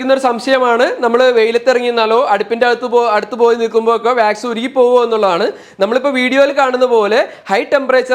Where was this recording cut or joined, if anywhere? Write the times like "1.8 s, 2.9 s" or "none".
none